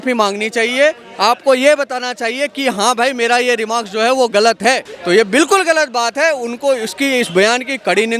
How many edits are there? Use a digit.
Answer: 1